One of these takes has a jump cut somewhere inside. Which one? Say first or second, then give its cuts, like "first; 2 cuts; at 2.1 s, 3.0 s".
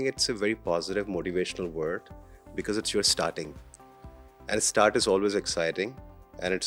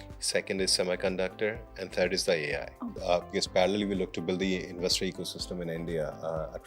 second; 1 cut; at 2.9 s